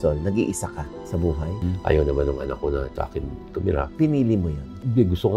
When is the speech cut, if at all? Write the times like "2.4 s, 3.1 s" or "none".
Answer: 1.6 s, 3.9 s